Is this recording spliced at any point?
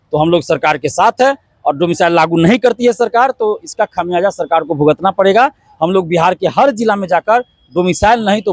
no; 0 cuts

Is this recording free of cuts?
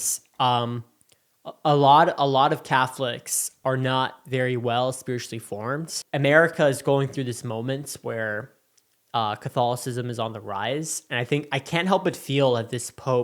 no; 1 cut; at 6.0 s

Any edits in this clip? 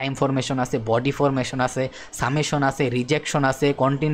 no; 0 cuts

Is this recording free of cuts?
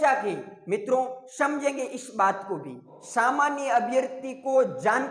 no; 1 cut; at 2.9 s

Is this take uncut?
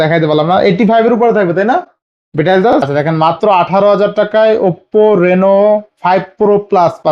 no; 1 cut; at 2.9 s

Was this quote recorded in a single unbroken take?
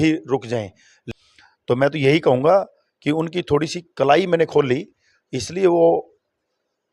no; 1 cut; at 1.0 s

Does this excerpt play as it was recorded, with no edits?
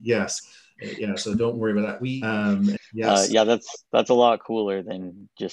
no; 1 cut; at 2.4 s

